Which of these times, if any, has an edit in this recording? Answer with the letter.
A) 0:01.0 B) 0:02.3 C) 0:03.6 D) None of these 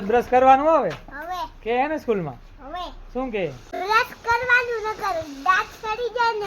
C